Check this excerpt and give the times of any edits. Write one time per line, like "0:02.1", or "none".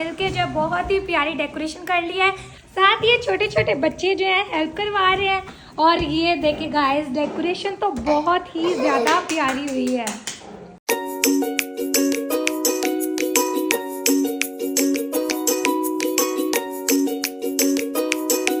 none